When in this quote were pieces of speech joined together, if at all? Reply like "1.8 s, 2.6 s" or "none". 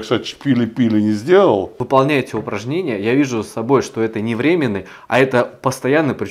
1.7 s

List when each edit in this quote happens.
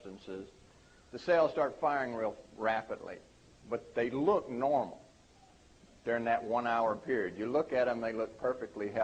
4.1 s

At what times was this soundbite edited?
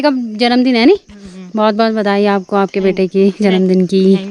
none

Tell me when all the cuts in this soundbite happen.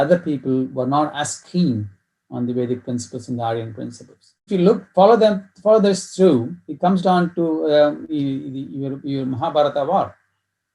4.5 s

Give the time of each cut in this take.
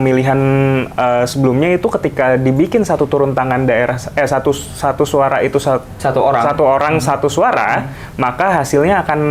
none

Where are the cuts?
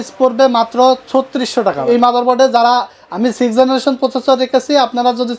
1.8 s

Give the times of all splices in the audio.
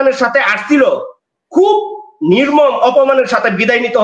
none

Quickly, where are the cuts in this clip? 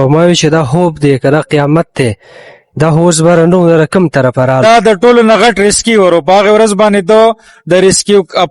4.6 s

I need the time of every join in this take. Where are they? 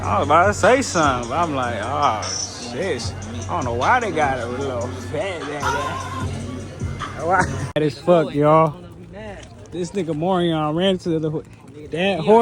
7.6 s

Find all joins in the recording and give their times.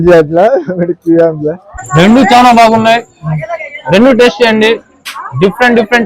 1.8 s

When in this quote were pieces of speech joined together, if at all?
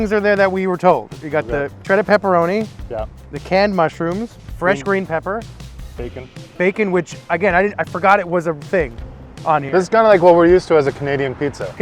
none

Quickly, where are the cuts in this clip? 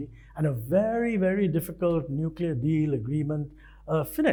none

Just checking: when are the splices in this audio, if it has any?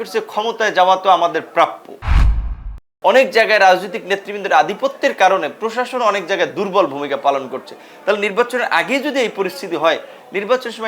2.4 s

